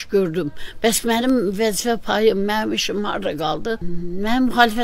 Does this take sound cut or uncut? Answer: cut